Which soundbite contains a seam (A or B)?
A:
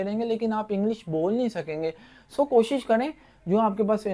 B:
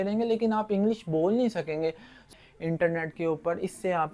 B